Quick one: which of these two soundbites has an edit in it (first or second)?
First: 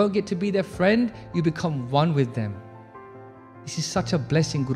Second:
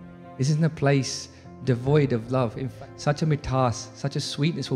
second